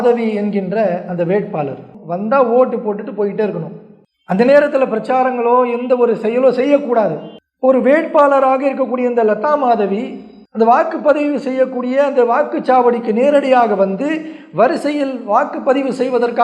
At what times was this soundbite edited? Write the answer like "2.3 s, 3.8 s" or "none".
1.9 s